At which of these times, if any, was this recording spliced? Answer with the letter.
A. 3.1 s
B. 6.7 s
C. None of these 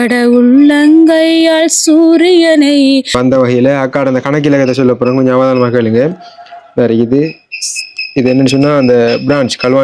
A